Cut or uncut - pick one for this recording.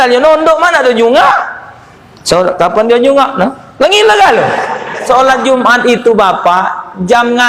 cut